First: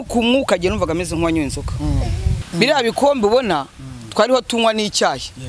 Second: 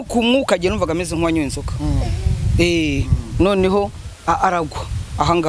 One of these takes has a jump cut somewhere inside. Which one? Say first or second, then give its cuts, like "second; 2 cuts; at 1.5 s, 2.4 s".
first; 1 cut; at 2.4 s